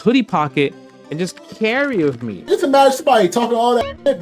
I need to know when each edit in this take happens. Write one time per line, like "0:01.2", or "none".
0:02.5